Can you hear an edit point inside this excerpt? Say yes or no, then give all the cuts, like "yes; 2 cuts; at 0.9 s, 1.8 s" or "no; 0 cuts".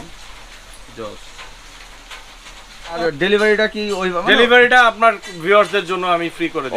yes; 1 cut; at 3.0 s